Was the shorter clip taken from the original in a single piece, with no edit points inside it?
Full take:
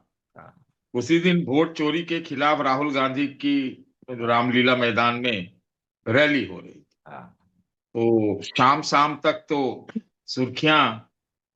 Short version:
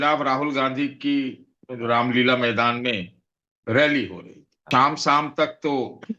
no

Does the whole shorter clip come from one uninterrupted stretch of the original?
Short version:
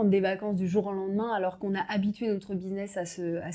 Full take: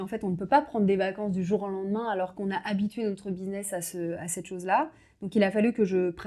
yes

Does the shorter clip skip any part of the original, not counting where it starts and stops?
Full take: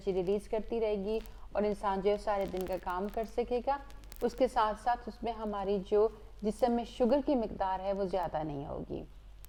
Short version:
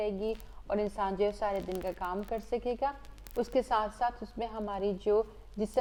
no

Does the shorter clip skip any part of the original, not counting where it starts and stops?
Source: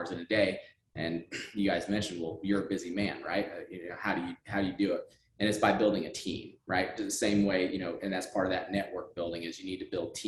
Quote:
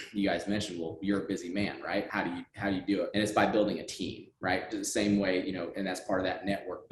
yes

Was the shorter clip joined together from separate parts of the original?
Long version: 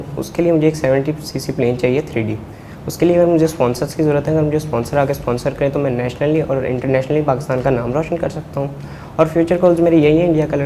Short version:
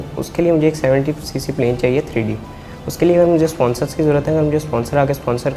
no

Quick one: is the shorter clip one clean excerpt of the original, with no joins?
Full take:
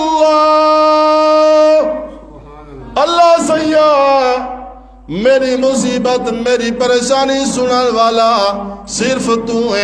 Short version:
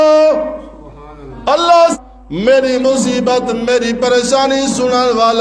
no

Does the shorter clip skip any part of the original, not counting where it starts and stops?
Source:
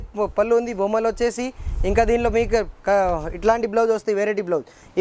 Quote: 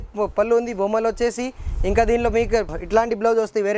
yes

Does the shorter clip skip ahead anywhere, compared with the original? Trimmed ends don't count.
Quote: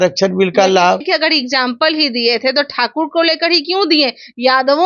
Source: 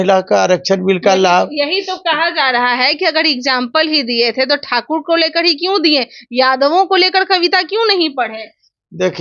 yes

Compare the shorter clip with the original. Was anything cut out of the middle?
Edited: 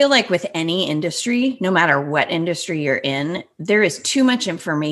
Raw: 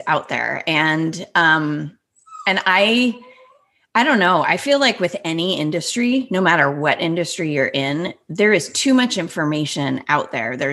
no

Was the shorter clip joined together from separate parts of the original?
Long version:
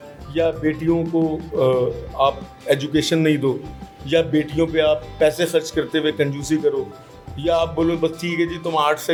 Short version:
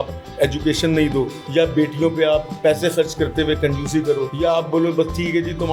yes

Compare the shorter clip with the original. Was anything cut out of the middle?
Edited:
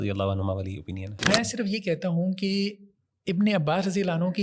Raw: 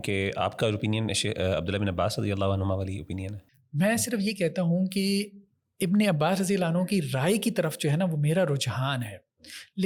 yes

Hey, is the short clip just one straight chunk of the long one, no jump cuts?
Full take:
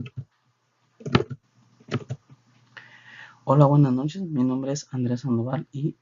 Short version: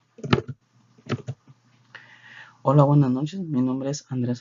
yes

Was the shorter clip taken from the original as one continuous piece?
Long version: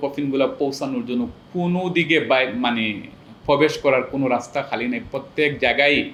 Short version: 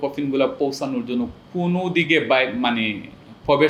yes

